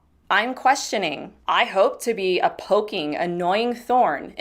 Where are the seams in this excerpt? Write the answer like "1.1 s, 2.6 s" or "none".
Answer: 1.3 s